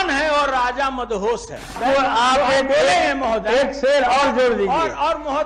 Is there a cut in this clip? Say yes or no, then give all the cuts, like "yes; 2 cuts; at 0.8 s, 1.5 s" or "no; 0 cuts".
yes; 1 cut; at 1.8 s